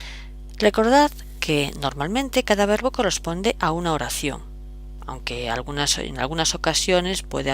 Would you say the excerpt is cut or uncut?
cut